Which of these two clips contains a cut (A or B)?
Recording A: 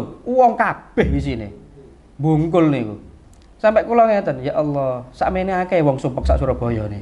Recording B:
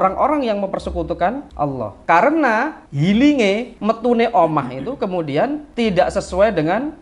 B